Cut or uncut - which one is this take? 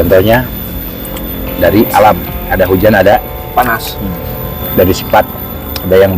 cut